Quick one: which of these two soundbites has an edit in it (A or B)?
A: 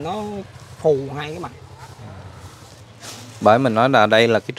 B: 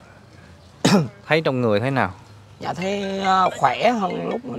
A